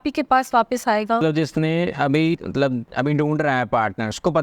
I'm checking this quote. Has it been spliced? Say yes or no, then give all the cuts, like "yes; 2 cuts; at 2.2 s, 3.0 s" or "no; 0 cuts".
yes; 1 cut; at 1.2 s